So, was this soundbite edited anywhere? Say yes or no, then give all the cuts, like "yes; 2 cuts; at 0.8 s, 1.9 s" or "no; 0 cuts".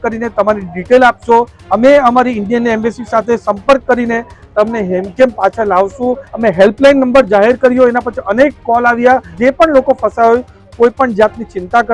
yes; 3 cuts; at 1.6 s, 6.3 s, 9.3 s